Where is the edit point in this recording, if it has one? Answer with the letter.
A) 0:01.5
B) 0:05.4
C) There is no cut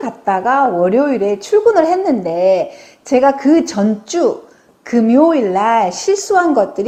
C